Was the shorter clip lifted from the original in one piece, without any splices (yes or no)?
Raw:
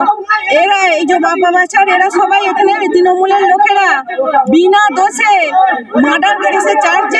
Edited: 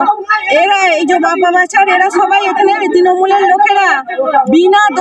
yes